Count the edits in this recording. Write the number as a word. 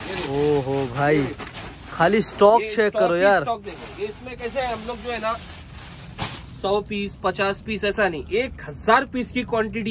zero